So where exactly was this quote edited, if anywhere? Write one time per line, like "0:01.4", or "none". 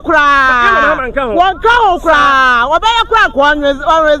none